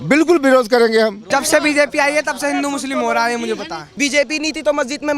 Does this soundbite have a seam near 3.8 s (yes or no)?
yes